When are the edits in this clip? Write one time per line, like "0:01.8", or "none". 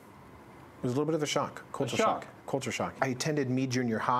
0:02.9